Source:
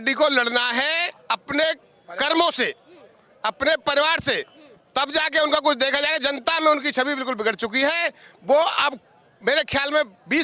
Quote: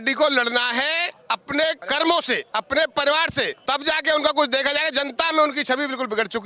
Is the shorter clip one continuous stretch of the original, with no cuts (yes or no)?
no